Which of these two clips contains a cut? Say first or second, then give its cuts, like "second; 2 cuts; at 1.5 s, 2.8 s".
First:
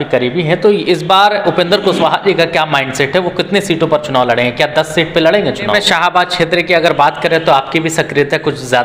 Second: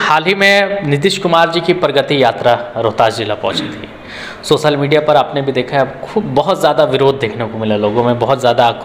first; 1 cut; at 5.7 s